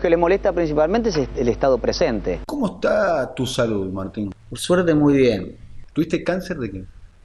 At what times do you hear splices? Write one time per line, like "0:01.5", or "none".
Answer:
0:02.4